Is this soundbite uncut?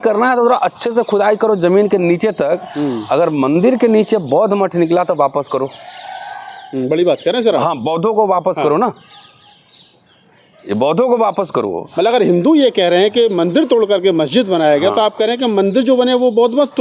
yes; 0 cuts

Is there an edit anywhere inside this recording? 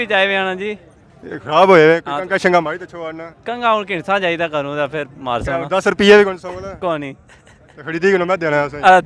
no; 0 cuts

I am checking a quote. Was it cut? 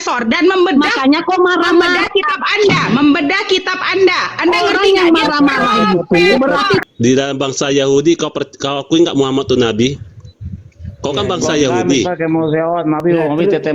yes; 1 cut; at 6.8 s

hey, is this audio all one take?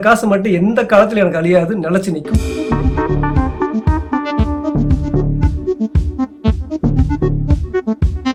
yes; 0 cuts

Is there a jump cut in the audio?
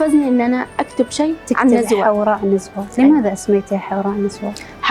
no; 0 cuts

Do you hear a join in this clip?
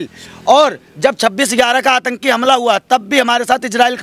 no; 0 cuts

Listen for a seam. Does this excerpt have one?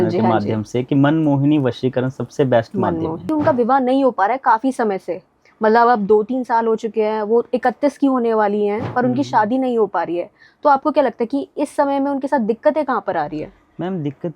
yes; 1 cut; at 3.2 s

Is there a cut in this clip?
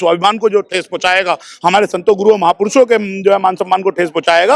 no; 0 cuts

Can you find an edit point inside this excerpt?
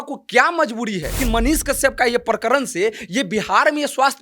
yes; 1 cut; at 1.2 s

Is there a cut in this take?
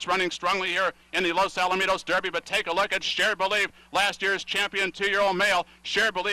no; 0 cuts

